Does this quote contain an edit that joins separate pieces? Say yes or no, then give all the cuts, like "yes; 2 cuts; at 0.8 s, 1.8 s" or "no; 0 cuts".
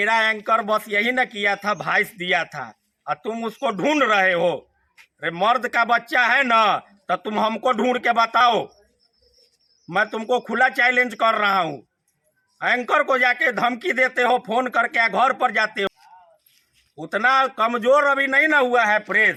no; 0 cuts